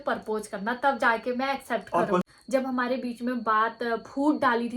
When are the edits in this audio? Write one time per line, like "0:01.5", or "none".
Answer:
0:02.2

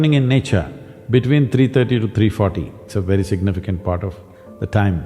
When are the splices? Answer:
0:02.8

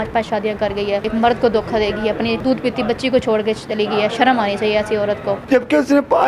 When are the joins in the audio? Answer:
0:01.0
0:02.4
0:05.4

